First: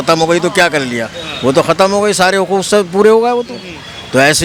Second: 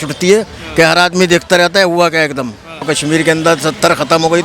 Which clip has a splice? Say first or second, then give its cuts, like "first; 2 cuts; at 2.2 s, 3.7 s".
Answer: second; 1 cut; at 2.8 s